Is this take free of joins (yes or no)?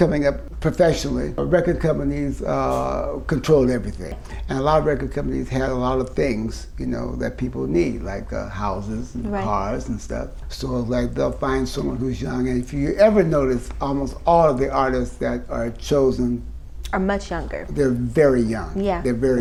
yes